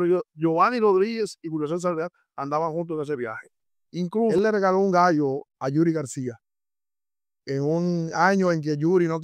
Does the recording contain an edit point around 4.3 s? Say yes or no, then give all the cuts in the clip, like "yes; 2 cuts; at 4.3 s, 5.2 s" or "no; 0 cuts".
yes; 1 cut; at 4.3 s